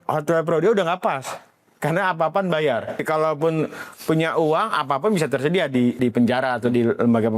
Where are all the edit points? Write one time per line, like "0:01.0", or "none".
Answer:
0:03.0
0:06.0